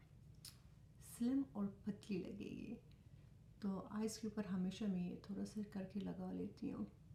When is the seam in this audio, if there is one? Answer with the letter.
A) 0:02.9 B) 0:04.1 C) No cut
C